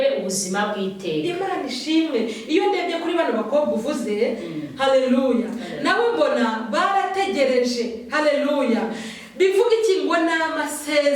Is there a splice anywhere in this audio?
no; 0 cuts

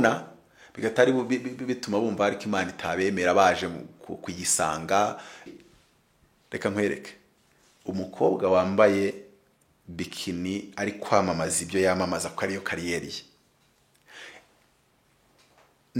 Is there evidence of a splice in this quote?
yes; 1 cut; at 5.5 s

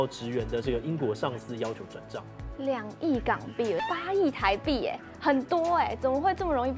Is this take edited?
yes; 1 cut; at 3.8 s

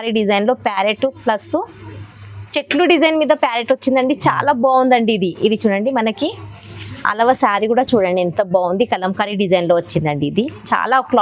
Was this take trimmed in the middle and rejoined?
no; 0 cuts

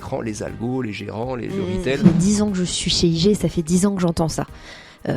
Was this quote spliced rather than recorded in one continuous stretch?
yes; 1 cut; at 2.0 s

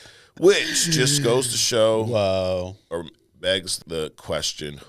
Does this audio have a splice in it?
yes; 1 cut; at 3.8 s

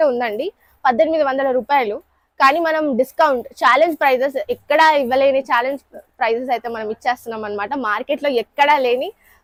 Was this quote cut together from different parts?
no; 0 cuts

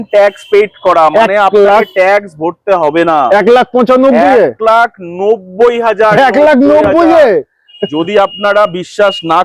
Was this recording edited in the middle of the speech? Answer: no; 0 cuts

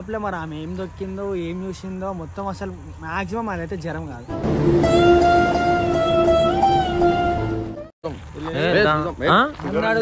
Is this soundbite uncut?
yes; 0 cuts

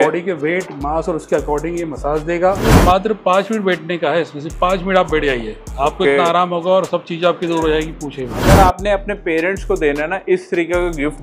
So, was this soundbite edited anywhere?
yes; 2 cuts; at 2.7 s, 8.4 s

